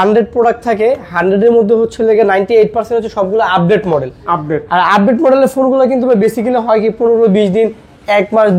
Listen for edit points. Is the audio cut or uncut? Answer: uncut